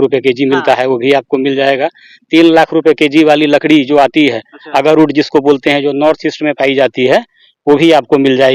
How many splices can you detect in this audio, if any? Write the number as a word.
zero